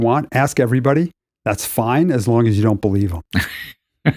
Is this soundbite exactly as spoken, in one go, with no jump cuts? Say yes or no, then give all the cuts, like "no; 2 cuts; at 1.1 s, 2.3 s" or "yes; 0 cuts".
no; 1 cut; at 3.2 s